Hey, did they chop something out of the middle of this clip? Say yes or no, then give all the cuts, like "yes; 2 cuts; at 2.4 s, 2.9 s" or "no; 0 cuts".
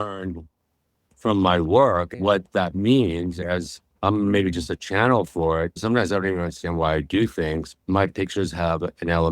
yes; 2 cuts; at 5.7 s, 7.7 s